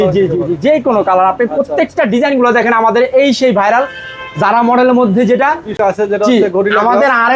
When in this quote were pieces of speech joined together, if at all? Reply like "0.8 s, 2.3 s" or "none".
5.7 s